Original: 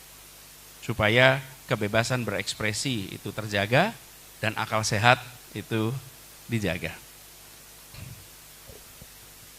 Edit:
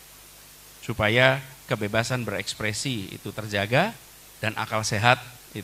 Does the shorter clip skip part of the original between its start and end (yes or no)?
no